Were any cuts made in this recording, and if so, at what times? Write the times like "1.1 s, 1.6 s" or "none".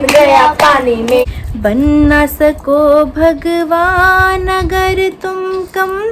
1.2 s